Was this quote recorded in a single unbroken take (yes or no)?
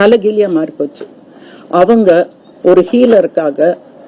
yes